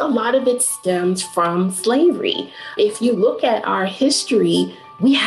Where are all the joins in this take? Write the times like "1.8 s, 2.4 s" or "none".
2.7 s